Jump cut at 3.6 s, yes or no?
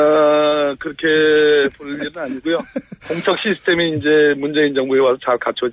no